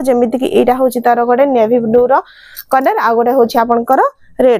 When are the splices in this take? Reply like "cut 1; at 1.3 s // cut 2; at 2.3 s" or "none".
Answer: none